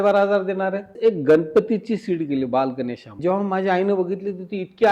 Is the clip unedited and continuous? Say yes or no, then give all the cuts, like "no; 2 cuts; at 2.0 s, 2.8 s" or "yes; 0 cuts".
no; 2 cuts; at 1.0 s, 3.1 s